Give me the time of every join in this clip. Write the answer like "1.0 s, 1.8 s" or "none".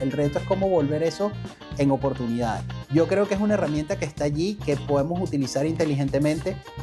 2.7 s